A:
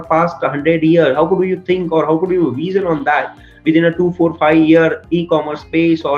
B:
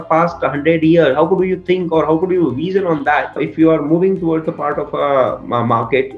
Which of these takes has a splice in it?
B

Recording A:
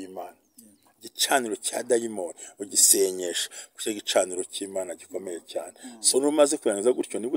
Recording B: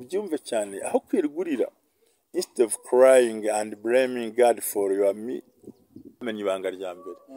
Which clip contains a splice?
B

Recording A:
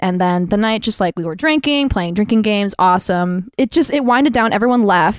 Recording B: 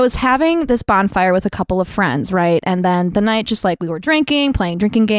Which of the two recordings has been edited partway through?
A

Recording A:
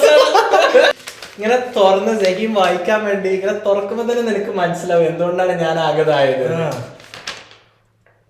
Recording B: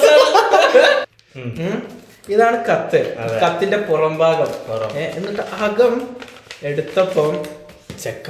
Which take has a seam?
A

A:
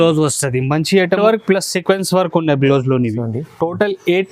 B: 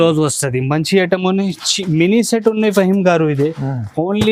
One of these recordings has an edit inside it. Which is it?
A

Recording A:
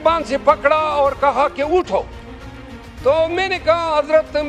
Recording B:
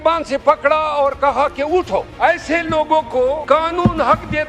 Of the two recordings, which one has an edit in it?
B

